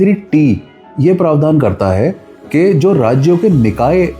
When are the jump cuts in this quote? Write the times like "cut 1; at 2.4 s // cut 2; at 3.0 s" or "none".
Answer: none